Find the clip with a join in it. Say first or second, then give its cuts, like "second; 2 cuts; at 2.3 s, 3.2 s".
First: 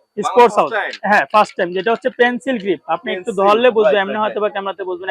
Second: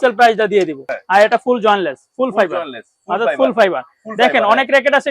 second; 1 cut; at 0.9 s